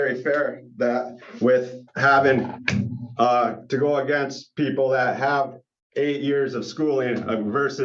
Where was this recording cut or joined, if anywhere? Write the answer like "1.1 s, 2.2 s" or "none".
none